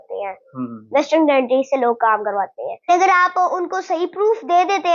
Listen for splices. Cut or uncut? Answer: cut